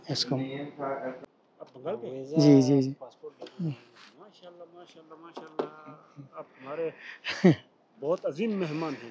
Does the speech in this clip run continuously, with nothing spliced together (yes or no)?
no